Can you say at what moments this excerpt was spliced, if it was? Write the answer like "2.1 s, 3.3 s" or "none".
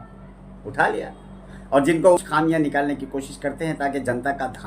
2.2 s